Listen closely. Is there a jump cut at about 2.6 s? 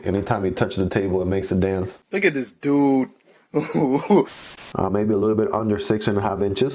no; 1 cut; at 4.7 s

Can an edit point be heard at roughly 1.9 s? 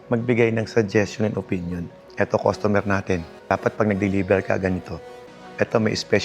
yes; 1 cut; at 1.9 s

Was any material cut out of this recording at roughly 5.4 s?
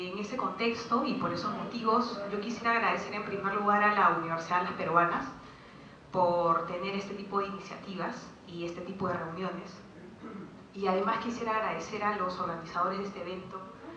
yes; 1 cut; at 5.4 s

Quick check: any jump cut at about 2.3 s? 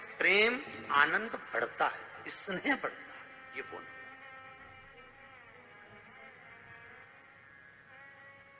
no; 0 cuts

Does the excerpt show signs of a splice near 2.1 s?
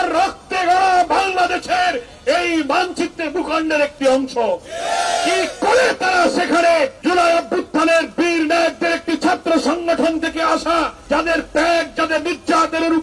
no; 2 cuts; at 7.0 s, 11.0 s

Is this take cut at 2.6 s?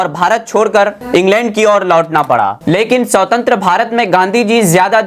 yes; 1 cut; at 2.6 s

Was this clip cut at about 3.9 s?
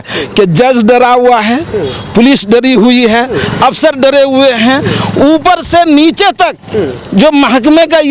no; 0 cuts

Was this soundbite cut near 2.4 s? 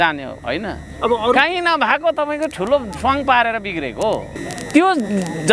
no; 1 cut; at 4.5 s

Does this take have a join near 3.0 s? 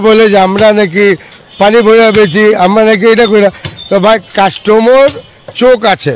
no; 0 cuts

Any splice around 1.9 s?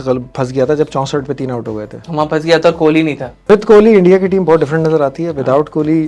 yes; 2 cuts; at 1.9 s, 3.5 s

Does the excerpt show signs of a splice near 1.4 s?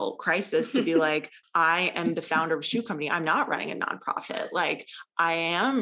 yes; 1 cut; at 1.4 s

